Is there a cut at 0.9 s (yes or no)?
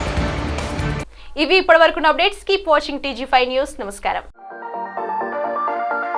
no